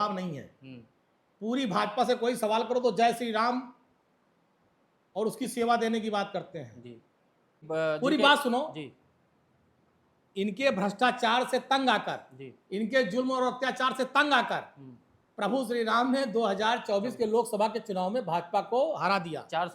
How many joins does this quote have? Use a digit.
1